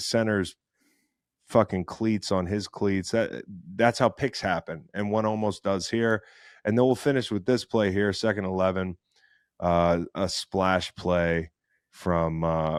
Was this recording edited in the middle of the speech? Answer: no; 0 cuts

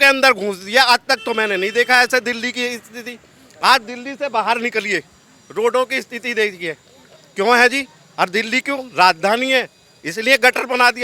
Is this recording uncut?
yes; 0 cuts

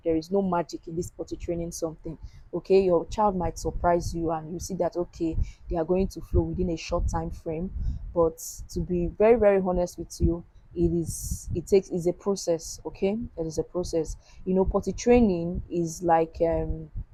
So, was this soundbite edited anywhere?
no; 0 cuts

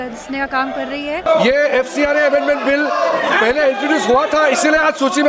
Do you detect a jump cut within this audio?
yes; 1 cut; at 1.3 s

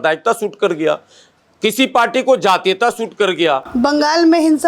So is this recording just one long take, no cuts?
no; 1 cut; at 3.7 s

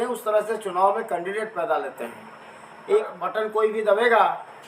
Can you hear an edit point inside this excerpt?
yes; 1 cut; at 3.0 s

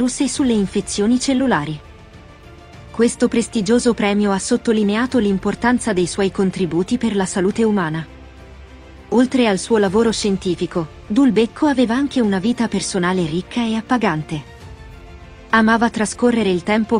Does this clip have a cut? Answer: no; 0 cuts

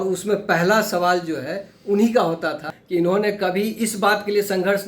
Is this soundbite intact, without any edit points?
no; 1 cut; at 2.7 s

